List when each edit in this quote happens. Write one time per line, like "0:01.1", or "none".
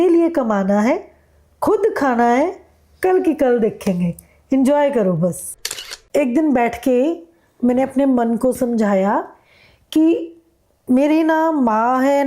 0:05.6